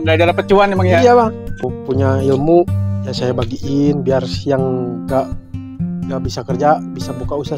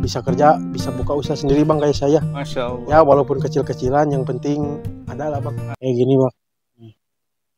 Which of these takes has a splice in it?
second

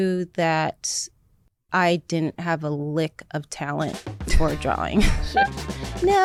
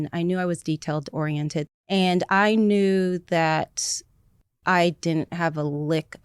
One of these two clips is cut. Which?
second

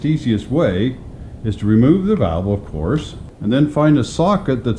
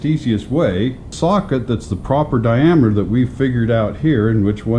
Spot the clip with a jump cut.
second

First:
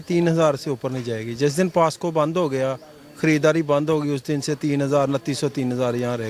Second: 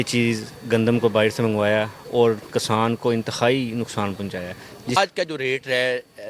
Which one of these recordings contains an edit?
second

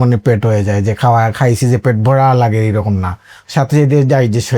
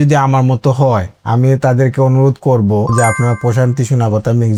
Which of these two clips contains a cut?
first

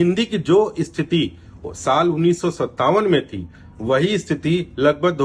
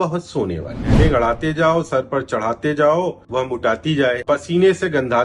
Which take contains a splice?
second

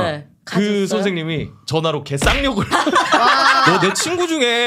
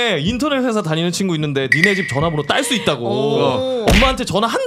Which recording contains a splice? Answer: first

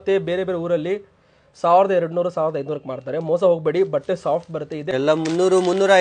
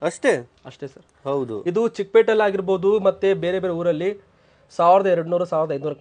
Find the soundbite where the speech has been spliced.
first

